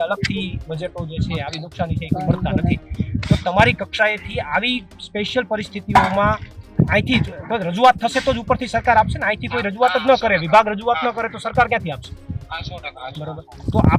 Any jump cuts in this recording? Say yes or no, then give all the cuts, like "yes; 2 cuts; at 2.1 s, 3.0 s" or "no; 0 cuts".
no; 0 cuts